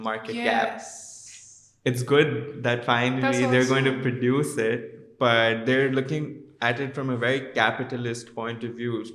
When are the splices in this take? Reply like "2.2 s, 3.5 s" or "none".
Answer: none

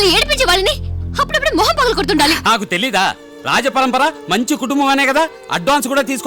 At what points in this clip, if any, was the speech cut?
2.4 s

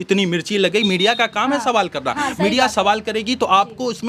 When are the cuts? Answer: none

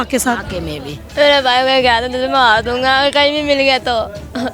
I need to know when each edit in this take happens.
1.1 s

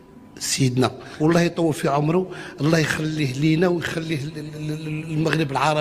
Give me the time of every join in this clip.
1.1 s

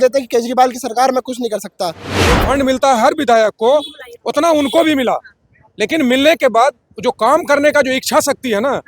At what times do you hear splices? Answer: 2.4 s

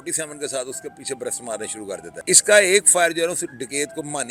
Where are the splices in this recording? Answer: 2.1 s

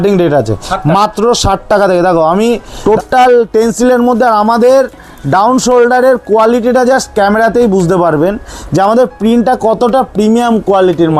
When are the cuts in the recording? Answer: 2.7 s

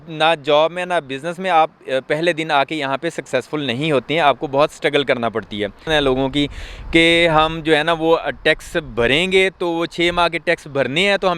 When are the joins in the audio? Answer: 5.9 s

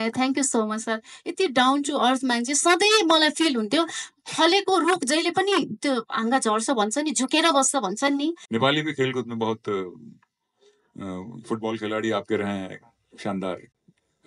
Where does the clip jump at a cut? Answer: 8.4 s

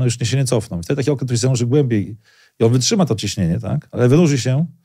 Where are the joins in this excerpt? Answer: none

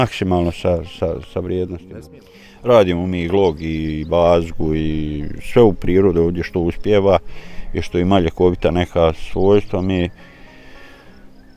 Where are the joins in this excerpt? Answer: 1.9 s

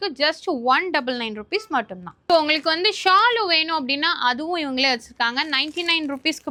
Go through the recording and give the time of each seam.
none

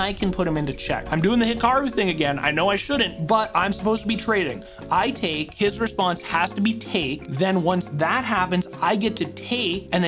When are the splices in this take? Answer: 1.0 s

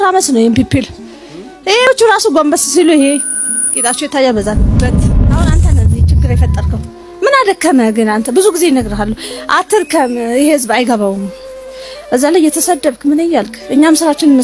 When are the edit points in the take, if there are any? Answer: 1.9 s

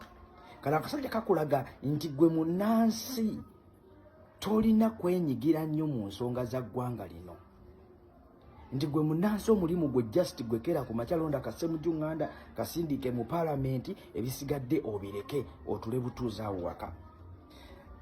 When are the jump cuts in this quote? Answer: 5.1 s

